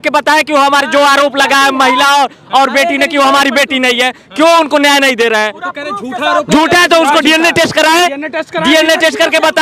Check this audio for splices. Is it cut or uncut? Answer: uncut